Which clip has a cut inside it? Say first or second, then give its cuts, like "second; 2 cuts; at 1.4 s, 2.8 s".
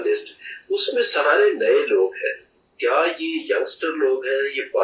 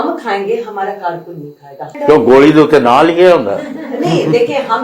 second; 1 cut; at 1.9 s